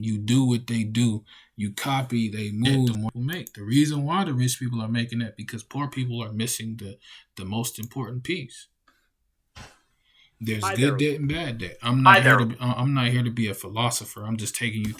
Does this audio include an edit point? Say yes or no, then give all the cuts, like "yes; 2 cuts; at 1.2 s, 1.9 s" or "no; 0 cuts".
yes; 1 cut; at 3.0 s